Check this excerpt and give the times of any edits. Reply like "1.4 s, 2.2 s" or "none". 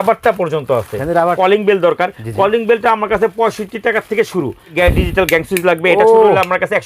1.4 s, 4.7 s

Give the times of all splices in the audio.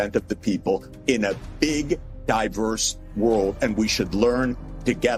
none

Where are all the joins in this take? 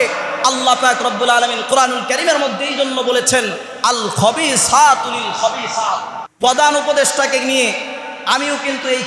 6.2 s

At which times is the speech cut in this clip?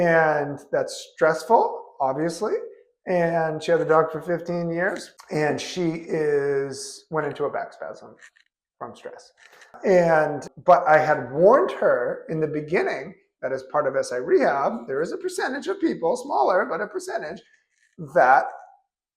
none

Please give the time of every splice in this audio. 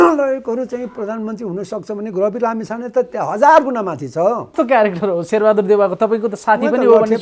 4.5 s

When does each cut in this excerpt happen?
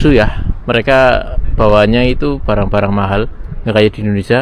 none

